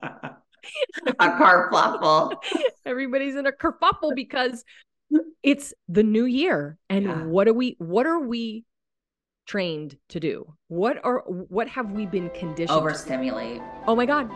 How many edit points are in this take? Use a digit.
0